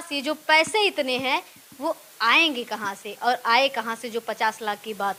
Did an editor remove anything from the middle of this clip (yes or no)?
no